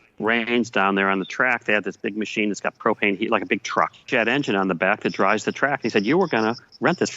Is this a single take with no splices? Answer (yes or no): no